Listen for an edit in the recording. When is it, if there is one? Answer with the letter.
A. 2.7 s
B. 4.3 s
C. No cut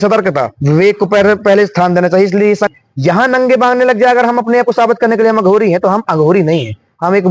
A